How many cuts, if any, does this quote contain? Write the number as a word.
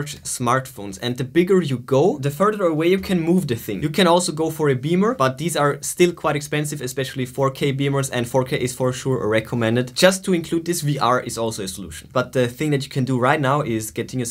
two